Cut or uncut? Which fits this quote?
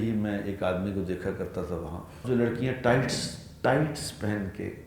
cut